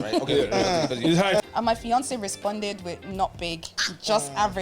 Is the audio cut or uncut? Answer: cut